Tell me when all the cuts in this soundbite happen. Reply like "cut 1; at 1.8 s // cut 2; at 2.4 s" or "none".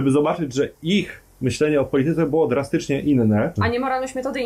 cut 1; at 3.6 s